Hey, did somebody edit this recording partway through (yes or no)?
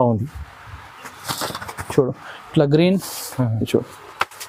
no